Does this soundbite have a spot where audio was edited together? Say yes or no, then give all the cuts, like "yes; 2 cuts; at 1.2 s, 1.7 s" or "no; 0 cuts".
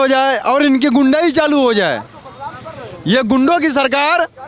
no; 0 cuts